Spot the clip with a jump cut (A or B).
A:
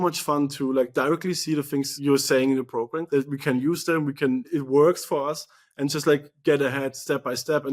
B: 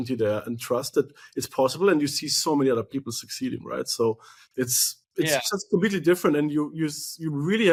A